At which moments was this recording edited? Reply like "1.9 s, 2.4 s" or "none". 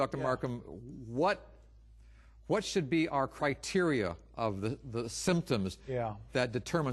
none

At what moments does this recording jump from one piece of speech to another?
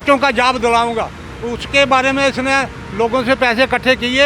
none

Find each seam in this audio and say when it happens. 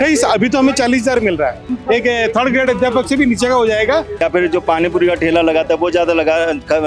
1.7 s, 4.2 s

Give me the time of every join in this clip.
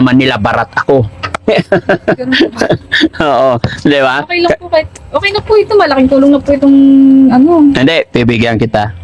none

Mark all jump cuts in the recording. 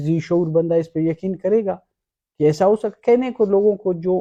none

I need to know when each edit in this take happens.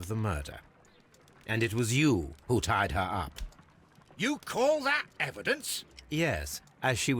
6.0 s

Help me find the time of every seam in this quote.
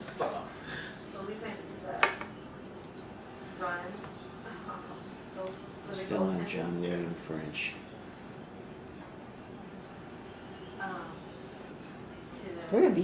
3.9 s

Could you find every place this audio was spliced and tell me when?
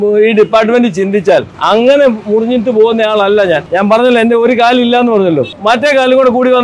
1.5 s, 3.7 s, 5.5 s

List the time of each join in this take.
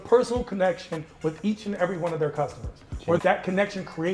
3.2 s

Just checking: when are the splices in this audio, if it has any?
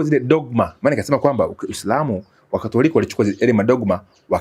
none

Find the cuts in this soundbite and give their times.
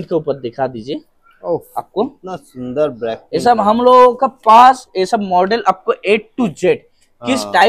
none

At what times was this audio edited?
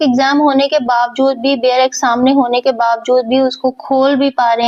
none

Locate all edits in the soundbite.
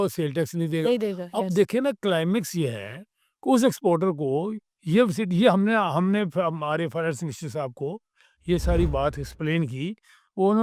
none

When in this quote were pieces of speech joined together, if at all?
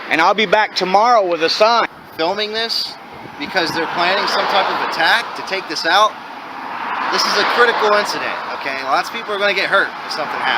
1.9 s

